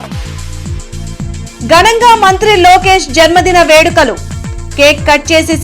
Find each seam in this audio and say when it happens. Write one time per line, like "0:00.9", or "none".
0:01.1